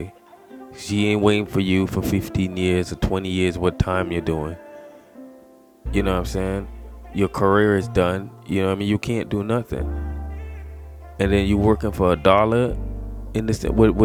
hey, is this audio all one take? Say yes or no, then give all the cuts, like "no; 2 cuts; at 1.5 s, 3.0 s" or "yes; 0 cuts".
yes; 0 cuts